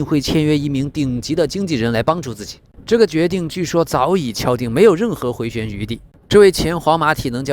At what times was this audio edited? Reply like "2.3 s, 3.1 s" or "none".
6.1 s